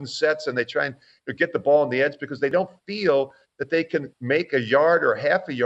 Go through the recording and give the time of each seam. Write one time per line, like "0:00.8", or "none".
0:02.5